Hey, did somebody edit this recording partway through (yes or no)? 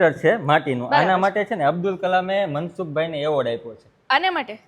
no